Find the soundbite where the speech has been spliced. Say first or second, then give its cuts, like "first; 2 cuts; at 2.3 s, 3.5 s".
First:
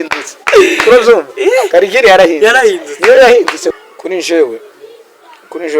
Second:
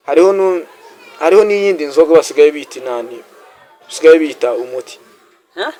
first; 1 cut; at 3.7 s